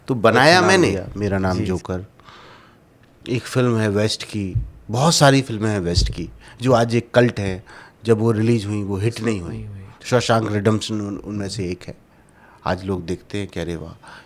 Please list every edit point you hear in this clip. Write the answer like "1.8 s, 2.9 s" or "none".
1.0 s